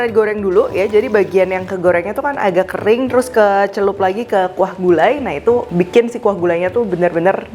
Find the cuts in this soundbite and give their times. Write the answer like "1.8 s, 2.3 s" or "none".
5.7 s